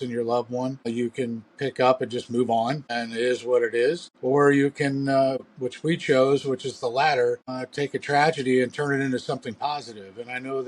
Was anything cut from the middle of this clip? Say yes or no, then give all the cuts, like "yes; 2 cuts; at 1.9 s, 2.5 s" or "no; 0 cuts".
yes; 5 cuts; at 0.9 s, 2.9 s, 4.1 s, 5.4 s, 7.6 s